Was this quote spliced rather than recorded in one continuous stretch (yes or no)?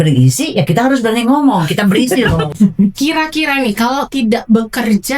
yes